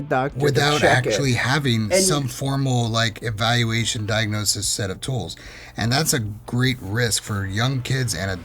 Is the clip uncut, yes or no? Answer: yes